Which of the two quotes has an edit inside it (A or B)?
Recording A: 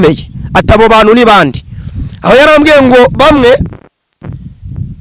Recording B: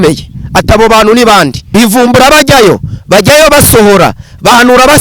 B